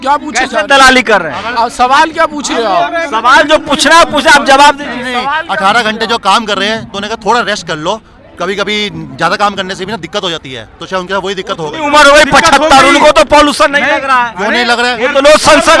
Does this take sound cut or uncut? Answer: uncut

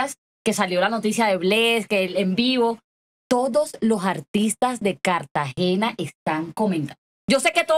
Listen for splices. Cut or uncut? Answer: uncut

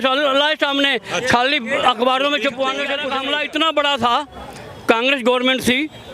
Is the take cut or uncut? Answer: cut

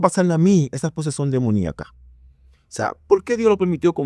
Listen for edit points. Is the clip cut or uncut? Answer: uncut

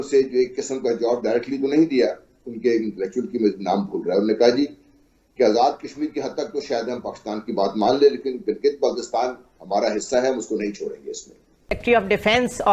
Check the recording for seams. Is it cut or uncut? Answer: cut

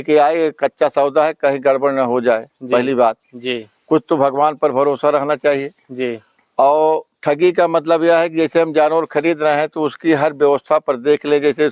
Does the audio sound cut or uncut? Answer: uncut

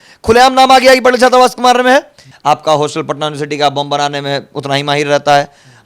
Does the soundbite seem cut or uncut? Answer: cut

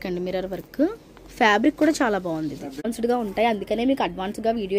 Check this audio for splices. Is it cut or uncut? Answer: cut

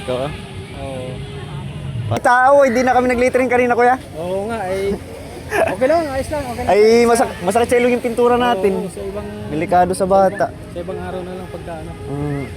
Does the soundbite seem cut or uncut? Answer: cut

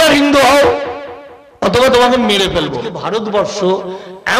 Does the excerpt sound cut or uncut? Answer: cut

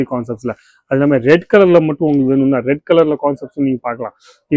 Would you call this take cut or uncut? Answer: uncut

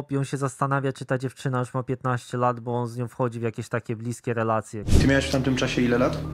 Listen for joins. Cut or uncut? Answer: cut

